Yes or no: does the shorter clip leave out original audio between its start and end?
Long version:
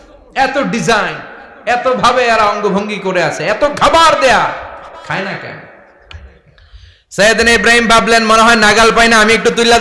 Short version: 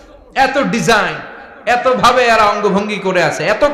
no